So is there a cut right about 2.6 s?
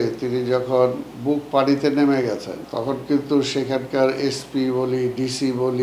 yes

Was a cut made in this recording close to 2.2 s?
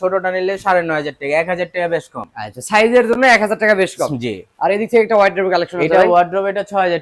no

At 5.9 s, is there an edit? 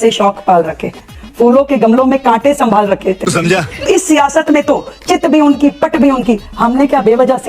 no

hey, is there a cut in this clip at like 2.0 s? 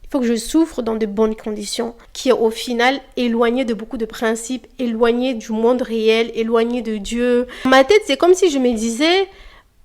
yes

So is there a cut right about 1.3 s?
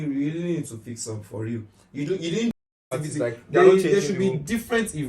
no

